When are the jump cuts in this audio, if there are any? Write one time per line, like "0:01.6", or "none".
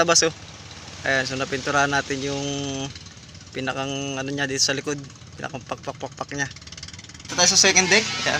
0:07.3